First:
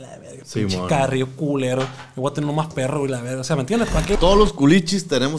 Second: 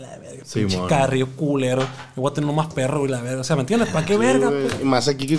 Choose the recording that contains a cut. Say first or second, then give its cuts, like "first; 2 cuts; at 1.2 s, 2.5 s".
first; 1 cut; at 4.2 s